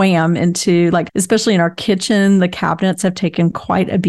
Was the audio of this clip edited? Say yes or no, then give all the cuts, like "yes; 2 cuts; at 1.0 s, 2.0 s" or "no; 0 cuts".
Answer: yes; 1 cut; at 1.1 s